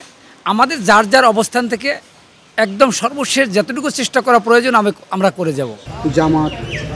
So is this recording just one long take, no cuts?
no; 1 cut; at 5.9 s

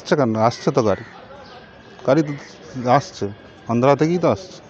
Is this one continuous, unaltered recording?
yes; 0 cuts

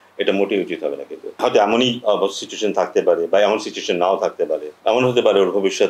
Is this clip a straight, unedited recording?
no; 2 cuts; at 1.4 s, 4.7 s

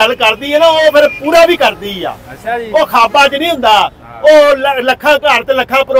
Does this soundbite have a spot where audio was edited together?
no; 0 cuts

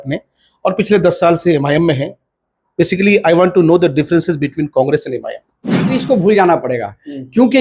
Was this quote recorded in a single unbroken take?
no; 1 cut; at 5.9 s

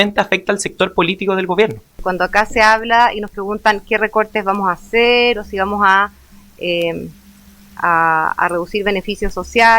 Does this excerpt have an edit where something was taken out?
yes; 1 cut; at 1.9 s

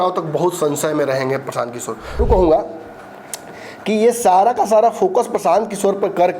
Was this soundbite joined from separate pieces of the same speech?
yes; 1 cut; at 2.2 s

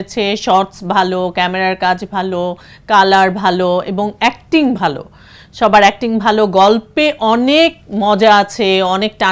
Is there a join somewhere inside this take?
no; 0 cuts

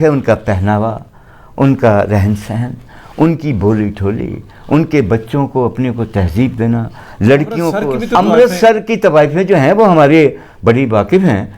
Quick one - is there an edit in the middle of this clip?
yes; 1 cut; at 7.8 s

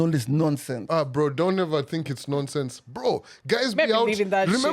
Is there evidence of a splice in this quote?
no; 0 cuts

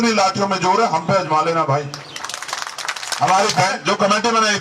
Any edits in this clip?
yes; 1 cut; at 3.6 s

